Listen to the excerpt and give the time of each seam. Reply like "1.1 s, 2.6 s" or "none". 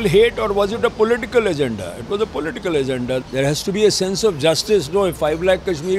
3.2 s